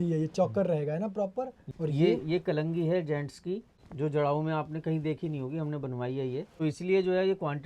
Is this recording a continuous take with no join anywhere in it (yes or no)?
no